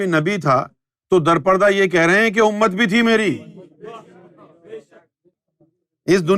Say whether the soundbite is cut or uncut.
uncut